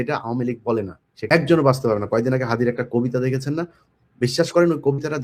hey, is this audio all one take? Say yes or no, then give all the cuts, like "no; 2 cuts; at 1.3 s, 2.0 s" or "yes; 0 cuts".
no; 1 cut; at 1.3 s